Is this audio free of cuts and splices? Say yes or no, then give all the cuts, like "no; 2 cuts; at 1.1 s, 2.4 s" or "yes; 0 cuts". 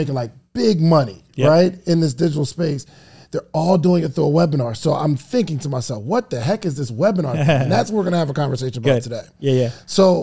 yes; 0 cuts